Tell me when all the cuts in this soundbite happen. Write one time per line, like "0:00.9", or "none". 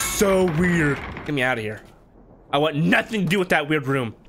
0:01.2